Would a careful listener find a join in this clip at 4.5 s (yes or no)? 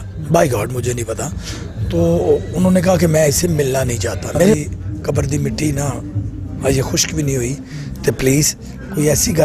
yes